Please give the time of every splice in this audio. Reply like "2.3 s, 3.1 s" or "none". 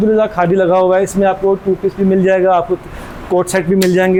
none